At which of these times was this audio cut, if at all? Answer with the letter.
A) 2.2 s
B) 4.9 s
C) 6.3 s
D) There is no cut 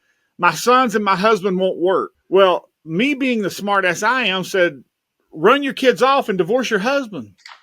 A